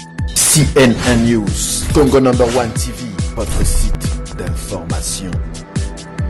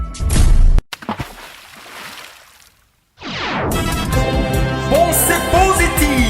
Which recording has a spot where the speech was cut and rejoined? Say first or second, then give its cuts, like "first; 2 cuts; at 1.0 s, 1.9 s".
second; 1 cut; at 0.9 s